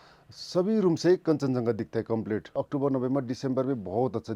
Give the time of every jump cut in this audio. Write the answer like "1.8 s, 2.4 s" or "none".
2.5 s